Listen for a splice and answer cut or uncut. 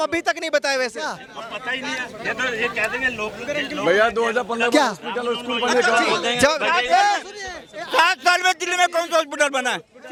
uncut